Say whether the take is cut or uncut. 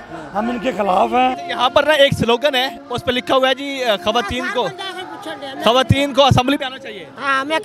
cut